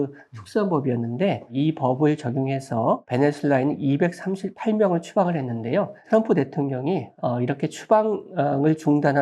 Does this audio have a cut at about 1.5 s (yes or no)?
yes